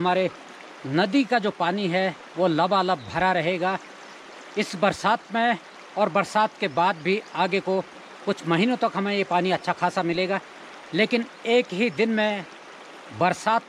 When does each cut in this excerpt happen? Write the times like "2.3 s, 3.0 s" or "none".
none